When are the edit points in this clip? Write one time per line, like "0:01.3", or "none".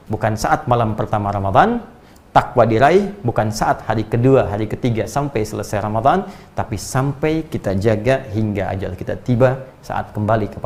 none